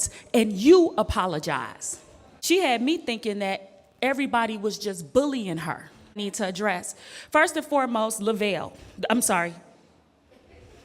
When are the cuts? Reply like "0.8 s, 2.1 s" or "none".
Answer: 2.3 s, 6.2 s